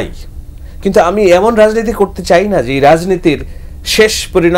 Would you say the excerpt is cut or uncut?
uncut